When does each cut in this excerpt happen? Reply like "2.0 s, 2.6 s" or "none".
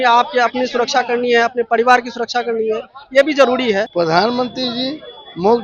3.9 s